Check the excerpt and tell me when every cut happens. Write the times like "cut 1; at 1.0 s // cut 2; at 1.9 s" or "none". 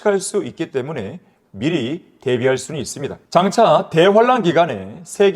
cut 1; at 3.2 s